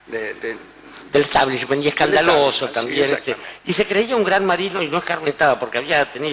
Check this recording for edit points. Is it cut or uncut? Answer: cut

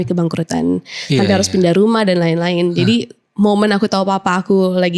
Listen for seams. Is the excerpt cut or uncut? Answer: uncut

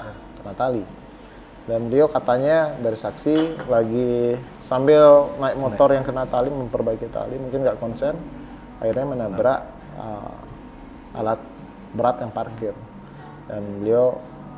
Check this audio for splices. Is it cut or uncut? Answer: uncut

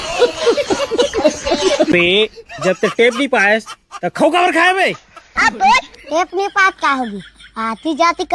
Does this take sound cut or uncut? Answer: cut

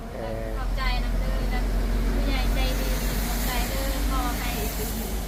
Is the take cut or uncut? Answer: uncut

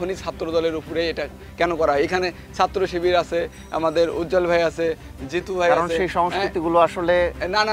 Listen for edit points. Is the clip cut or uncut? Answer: uncut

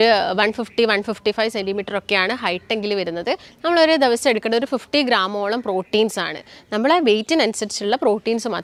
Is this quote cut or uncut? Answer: uncut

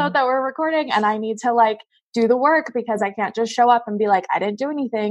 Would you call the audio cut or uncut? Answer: uncut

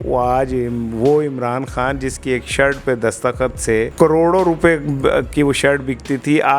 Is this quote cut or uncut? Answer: cut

